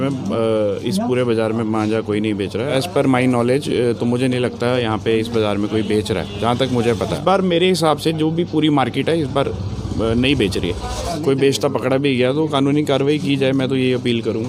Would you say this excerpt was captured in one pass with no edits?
no; 3 cuts; at 2.8 s, 7.2 s, 11.0 s

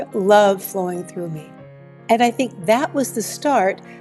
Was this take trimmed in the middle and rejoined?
no; 0 cuts

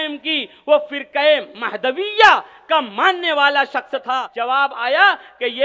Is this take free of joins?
no; 1 cut; at 4.1 s

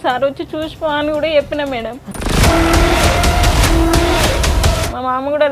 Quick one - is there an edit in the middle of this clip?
yes; 2 cuts; at 2.1 s, 4.7 s

